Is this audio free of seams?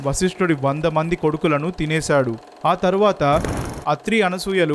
no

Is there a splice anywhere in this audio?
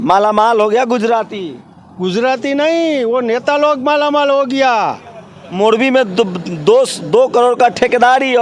no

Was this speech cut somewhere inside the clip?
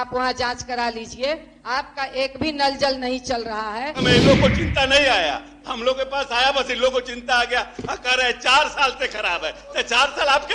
yes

